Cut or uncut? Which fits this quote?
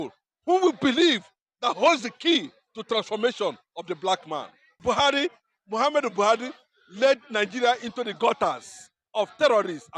cut